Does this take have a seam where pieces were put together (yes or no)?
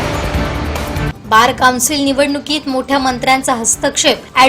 yes